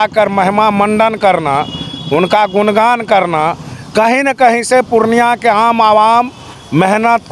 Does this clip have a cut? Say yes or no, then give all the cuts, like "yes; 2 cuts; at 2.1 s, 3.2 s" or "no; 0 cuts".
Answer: no; 0 cuts